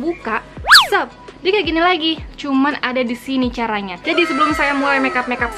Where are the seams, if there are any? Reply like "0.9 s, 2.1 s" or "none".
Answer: none

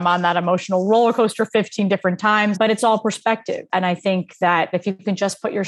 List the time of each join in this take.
2.6 s, 4.7 s

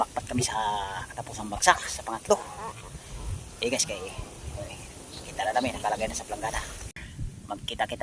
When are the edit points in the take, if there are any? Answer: 7.0 s

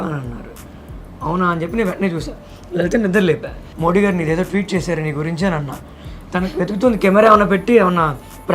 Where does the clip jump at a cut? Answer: 3.6 s, 6.1 s

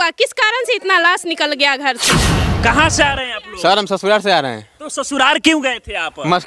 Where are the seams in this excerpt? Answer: 2.5 s

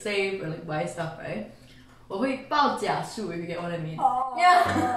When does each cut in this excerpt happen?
none

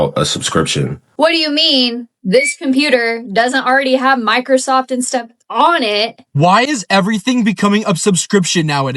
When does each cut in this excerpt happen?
1.0 s, 6.2 s

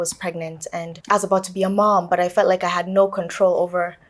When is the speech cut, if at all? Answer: 0.9 s

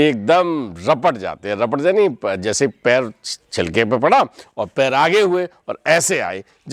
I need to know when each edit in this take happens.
none

